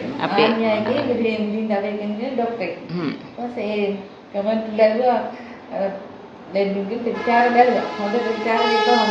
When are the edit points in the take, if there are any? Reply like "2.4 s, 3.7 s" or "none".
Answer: none